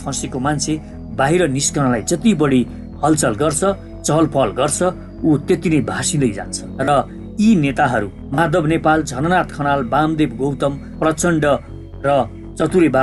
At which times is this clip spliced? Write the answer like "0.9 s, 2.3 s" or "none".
none